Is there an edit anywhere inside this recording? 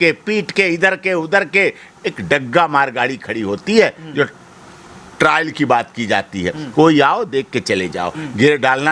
no; 0 cuts

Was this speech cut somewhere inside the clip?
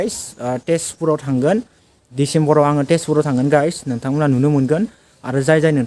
no; 0 cuts

